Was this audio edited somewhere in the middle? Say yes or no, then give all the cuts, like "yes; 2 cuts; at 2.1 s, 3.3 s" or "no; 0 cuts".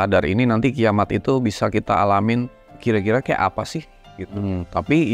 yes; 1 cut; at 2.8 s